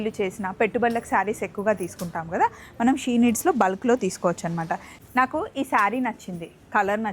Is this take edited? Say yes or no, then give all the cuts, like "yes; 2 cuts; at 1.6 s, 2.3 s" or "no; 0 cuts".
yes; 1 cut; at 4.6 s